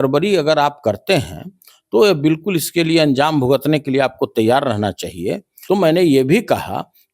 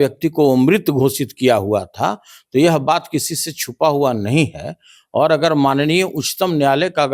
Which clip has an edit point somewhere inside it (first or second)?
first